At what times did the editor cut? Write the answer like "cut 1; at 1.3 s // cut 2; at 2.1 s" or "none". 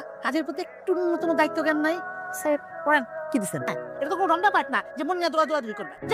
cut 1; at 3.7 s